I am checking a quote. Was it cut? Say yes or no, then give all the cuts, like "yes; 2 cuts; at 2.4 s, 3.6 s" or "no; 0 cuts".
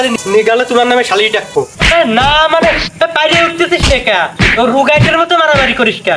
yes; 1 cut; at 1.8 s